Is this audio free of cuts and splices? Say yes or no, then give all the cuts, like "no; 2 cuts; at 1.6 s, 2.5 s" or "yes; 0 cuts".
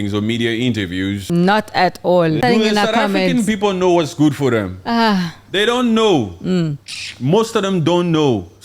no; 2 cuts; at 1.2 s, 2.4 s